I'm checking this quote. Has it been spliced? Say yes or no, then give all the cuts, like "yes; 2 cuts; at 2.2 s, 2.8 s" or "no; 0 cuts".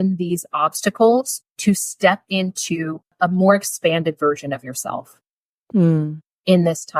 yes; 1 cut; at 3.1 s